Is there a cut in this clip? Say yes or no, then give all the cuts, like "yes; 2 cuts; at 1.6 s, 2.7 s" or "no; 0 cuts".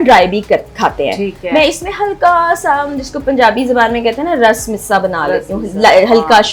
no; 0 cuts